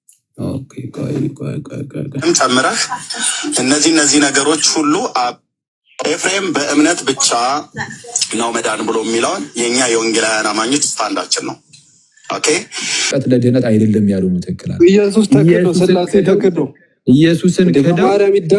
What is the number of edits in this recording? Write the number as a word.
one